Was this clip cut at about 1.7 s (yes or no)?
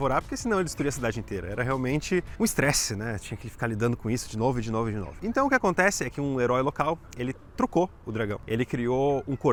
no